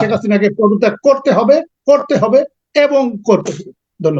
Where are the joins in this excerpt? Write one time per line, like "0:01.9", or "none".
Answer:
none